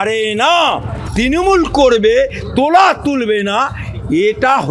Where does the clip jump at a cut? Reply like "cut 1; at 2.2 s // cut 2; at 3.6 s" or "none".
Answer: cut 1; at 1.0 s

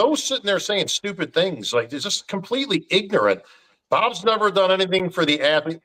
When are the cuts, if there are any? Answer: none

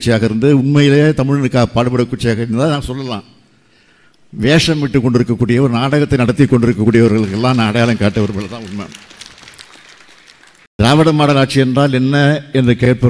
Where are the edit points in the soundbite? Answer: cut 1; at 10.6 s

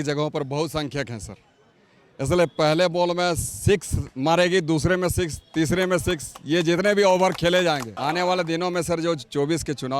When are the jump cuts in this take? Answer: cut 1; at 7.9 s

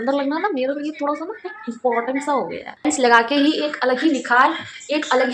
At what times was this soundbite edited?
cut 1; at 2.7 s

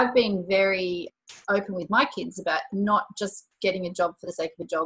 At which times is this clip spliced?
cut 1; at 1.1 s // cut 2; at 2.7 s

